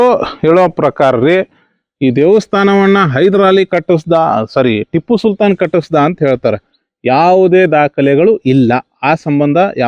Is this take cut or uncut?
uncut